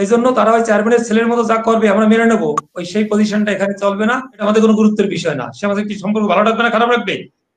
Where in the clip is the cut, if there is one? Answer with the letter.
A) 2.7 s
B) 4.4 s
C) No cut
B